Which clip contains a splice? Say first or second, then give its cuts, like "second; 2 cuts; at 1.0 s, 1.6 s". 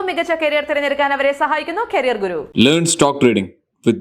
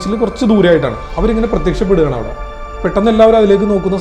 second; 1 cut; at 1.0 s